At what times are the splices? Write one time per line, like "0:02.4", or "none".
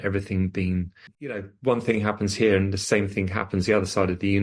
0:01.4